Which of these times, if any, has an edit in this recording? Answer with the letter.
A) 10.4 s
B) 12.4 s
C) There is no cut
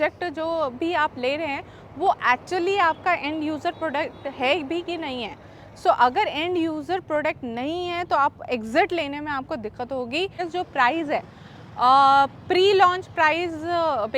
A